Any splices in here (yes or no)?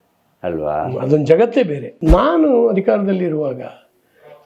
yes